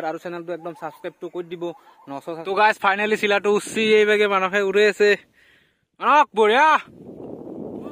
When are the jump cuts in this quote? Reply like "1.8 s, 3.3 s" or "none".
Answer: 2.4 s